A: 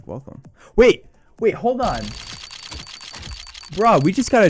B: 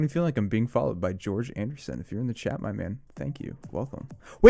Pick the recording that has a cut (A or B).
A